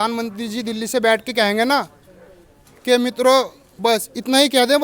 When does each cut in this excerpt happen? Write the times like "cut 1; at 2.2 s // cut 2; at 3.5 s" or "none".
none

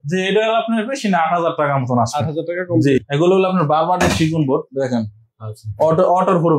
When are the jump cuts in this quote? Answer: cut 1; at 3.0 s

